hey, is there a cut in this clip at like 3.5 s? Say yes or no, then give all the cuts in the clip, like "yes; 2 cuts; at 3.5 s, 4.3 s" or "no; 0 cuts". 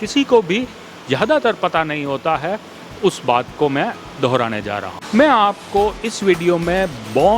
no; 1 cut; at 4.9 s